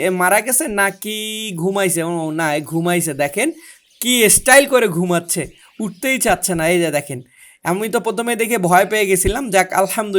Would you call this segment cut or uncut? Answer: uncut